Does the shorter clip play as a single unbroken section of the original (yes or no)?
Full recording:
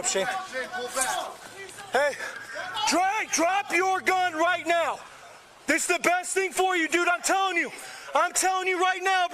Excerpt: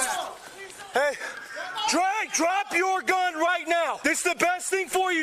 no